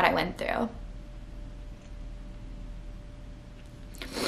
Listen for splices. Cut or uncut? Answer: uncut